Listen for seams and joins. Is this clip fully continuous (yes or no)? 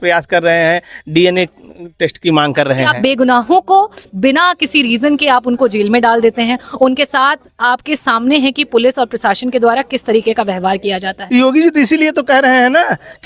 no